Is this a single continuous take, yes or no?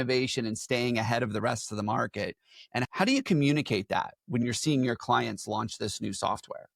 no